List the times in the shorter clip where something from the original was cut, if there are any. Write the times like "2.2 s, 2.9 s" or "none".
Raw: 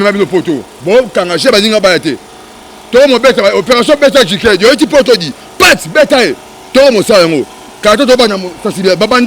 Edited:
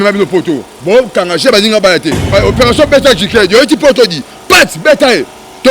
2.3 s